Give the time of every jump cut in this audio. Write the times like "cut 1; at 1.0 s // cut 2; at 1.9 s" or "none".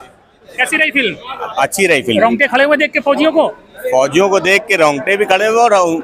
none